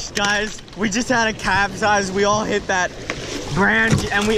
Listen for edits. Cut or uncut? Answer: uncut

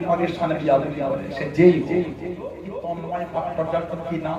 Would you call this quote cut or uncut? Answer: cut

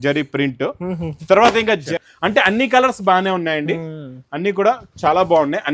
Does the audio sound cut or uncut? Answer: cut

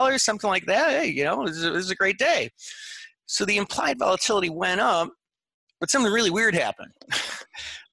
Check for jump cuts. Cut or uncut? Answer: uncut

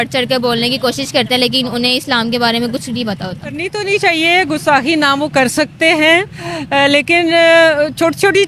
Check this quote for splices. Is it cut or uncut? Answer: cut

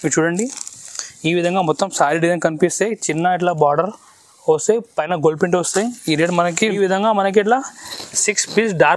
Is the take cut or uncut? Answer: cut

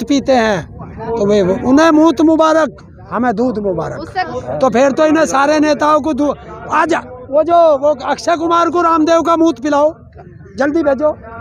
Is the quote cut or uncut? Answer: cut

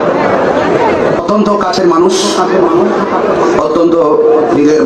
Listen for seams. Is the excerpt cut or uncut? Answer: cut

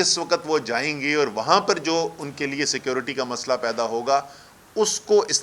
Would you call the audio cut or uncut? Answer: uncut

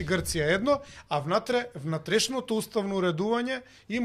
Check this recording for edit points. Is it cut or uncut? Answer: uncut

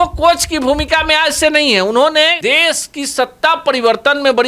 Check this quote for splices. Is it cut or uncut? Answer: cut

